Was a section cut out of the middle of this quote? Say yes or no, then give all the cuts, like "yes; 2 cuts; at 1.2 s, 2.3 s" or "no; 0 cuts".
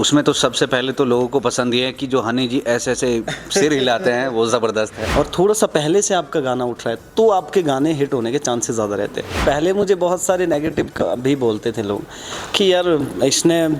yes; 2 cuts; at 5.0 s, 9.3 s